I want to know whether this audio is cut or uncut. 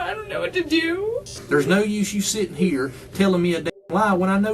cut